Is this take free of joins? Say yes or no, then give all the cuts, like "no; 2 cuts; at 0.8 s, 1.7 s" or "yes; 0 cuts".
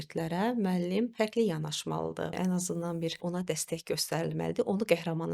no; 3 cuts; at 1.1 s, 2.4 s, 3.2 s